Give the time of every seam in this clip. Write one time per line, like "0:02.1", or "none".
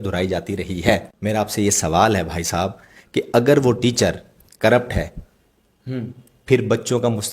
0:01.1